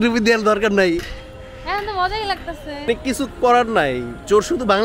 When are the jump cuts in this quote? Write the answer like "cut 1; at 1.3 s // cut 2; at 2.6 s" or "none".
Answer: cut 1; at 2.9 s

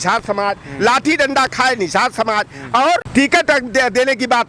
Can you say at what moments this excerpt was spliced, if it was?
cut 1; at 3.1 s

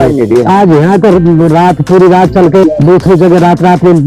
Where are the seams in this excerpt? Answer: cut 1; at 2.6 s

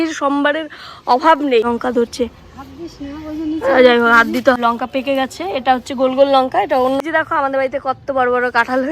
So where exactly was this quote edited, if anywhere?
cut 1; at 1.7 s // cut 2; at 4.6 s // cut 3; at 7.0 s

